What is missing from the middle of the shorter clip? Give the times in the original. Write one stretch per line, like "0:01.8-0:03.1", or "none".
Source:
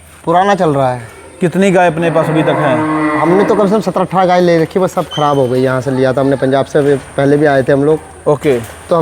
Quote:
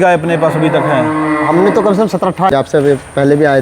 0:04.1-0:06.4